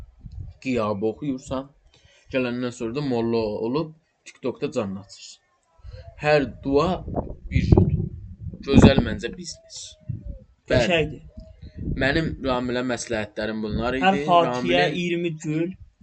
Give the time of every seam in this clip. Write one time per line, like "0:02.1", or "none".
none